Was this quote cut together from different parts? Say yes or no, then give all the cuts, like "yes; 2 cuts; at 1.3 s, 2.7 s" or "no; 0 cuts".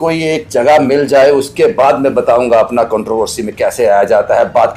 no; 0 cuts